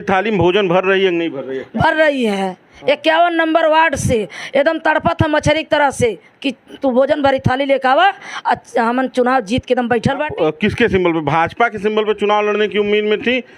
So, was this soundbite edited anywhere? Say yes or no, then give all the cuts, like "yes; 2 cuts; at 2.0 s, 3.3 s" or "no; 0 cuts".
yes; 1 cut; at 10.3 s